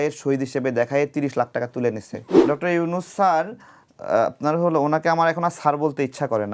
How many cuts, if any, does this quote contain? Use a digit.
1